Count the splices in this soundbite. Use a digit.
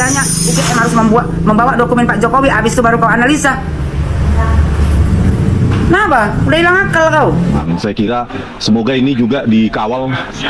1